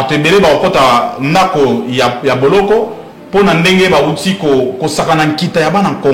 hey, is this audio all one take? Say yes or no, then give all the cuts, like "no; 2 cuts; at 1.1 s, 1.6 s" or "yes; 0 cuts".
yes; 0 cuts